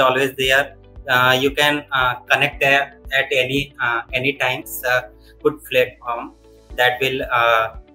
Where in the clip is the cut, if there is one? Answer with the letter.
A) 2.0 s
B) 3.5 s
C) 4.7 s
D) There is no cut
C